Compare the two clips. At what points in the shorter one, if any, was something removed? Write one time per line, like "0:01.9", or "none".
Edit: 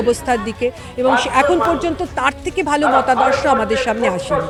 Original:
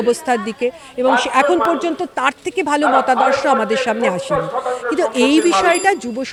none